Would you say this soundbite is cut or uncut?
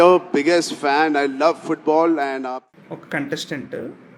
cut